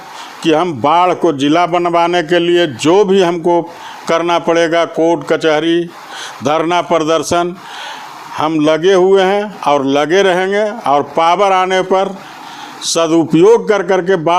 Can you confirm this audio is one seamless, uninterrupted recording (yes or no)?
yes